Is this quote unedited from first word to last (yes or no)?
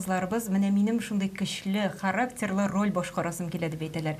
yes